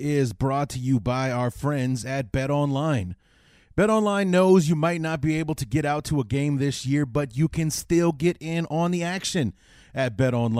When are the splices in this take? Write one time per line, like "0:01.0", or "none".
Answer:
none